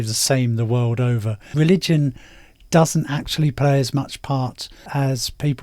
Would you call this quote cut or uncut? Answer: uncut